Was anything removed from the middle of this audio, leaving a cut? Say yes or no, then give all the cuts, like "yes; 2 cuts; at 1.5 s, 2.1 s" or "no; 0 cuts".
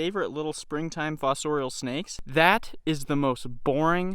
yes; 1 cut; at 2.2 s